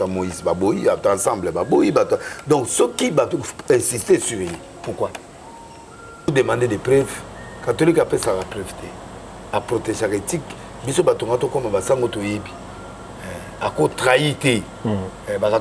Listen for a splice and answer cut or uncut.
cut